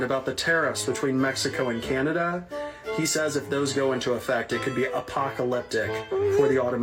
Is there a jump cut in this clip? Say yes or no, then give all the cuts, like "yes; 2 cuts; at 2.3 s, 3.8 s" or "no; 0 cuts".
no; 0 cuts